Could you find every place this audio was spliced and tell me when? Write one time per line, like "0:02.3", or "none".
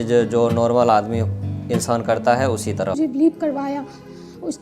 0:03.0